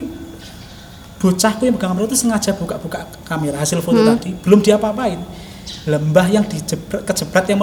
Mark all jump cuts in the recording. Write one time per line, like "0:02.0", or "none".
none